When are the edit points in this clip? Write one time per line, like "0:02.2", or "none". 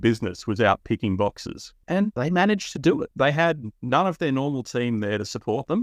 0:02.0
0:03.1